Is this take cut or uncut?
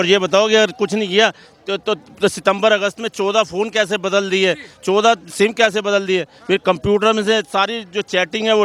uncut